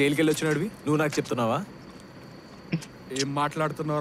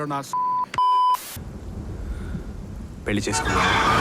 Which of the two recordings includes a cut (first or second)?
second